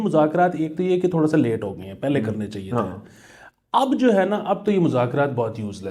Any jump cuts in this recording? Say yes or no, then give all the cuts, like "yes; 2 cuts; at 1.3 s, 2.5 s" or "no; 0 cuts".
no; 0 cuts